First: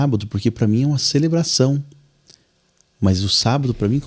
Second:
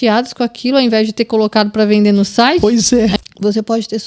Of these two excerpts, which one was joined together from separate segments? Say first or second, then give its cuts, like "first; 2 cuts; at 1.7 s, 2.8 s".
second; 1 cut; at 3.1 s